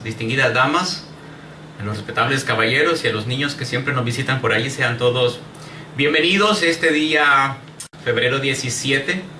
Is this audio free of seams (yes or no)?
yes